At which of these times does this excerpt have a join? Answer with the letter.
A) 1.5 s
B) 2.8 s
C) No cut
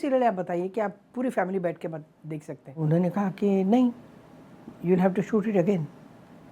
B